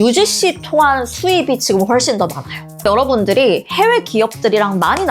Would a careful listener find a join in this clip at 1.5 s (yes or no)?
no